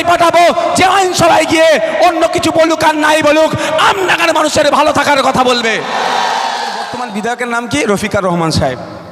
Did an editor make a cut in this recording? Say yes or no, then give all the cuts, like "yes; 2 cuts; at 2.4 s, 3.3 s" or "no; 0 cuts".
yes; 1 cut; at 7.0 s